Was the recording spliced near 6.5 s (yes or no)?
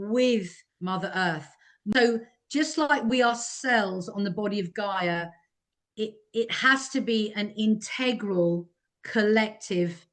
no